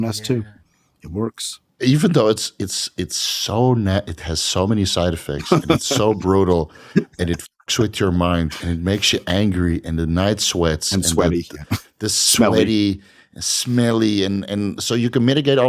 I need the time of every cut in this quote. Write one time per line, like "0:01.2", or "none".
none